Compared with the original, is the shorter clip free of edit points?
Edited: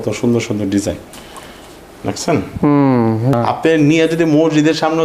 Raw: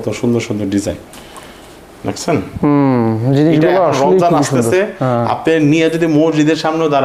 no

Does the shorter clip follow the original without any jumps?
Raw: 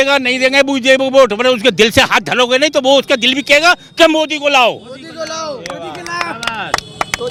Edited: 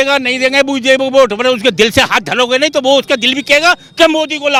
yes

